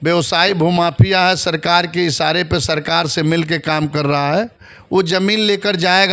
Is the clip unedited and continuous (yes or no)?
yes